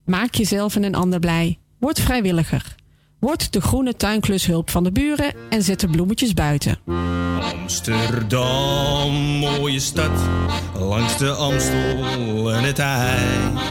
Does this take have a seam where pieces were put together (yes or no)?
no